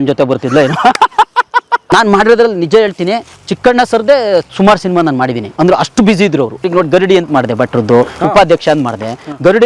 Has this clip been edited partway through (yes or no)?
yes